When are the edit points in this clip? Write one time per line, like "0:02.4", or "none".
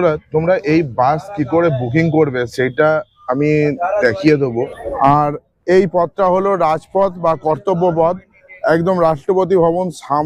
0:04.7